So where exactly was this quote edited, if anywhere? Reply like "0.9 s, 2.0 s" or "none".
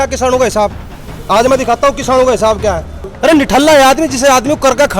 3.0 s